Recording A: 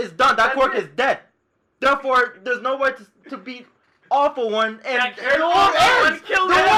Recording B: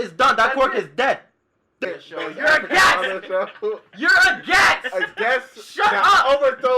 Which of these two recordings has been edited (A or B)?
B